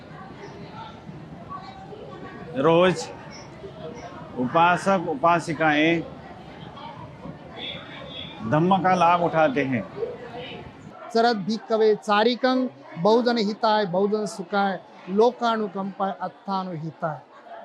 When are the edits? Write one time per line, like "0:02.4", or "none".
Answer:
0:10.9